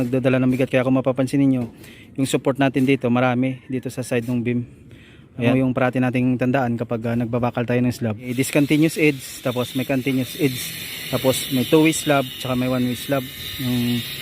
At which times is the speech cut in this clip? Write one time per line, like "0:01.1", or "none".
0:05.5
0:08.3